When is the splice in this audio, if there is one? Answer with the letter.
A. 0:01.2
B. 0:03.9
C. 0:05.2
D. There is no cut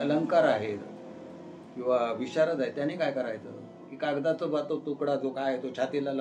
B